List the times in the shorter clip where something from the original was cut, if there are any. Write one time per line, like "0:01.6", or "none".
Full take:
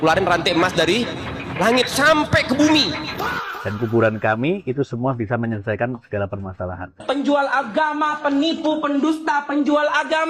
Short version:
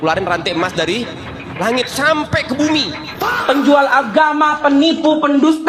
0:03.3